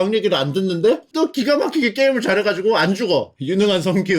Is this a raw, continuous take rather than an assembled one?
yes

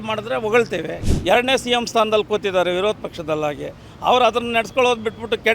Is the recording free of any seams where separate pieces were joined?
no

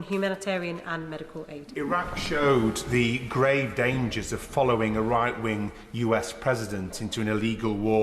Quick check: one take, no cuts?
no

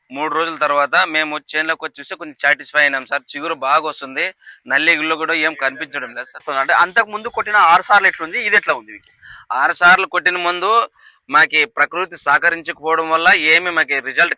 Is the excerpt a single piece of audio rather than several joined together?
yes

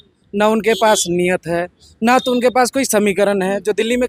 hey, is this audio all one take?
yes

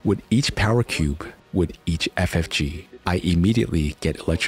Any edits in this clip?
yes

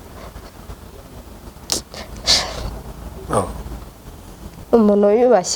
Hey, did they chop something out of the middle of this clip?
no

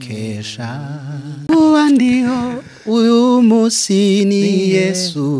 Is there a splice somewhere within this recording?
yes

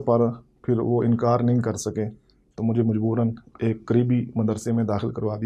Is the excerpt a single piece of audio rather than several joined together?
yes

